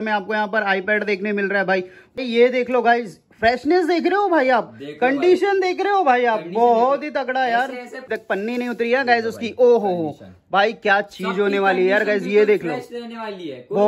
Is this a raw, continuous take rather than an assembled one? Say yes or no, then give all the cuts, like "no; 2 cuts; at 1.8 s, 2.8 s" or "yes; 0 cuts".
no; 2 cuts; at 2.2 s, 8.1 s